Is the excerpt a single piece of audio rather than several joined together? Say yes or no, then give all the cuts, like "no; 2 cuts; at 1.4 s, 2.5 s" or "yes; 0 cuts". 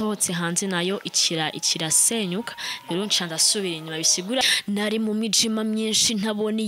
no; 1 cut; at 4.4 s